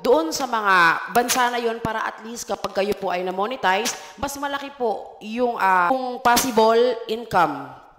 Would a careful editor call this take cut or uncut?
cut